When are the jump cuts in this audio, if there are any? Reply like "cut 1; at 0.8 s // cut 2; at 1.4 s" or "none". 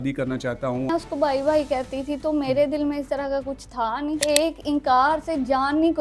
cut 1; at 0.9 s // cut 2; at 4.2 s